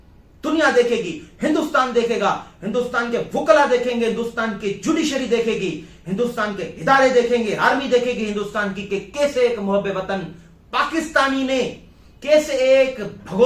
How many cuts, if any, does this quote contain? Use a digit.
0